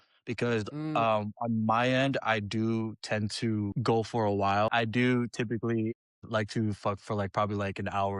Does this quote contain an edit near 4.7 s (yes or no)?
yes